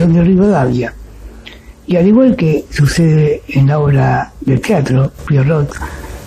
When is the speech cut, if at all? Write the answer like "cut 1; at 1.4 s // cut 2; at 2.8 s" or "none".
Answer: none